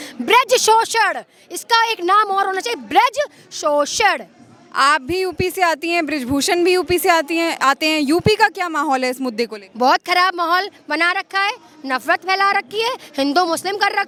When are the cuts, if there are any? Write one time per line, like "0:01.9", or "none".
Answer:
none